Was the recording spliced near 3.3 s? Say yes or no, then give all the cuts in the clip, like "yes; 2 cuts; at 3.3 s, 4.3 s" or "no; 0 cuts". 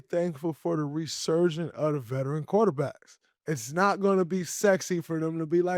yes; 1 cut; at 3.3 s